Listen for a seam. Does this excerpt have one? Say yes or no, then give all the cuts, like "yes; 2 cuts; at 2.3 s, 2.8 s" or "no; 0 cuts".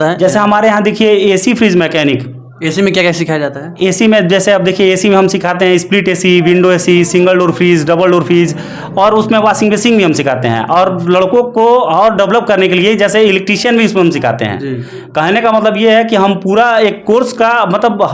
no; 0 cuts